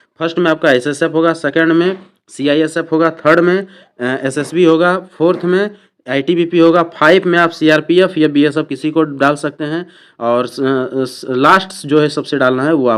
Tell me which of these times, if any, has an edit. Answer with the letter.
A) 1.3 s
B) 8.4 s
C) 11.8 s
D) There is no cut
D